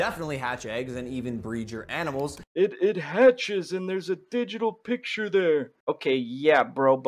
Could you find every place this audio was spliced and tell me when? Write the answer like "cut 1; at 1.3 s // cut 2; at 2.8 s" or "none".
cut 1; at 2.4 s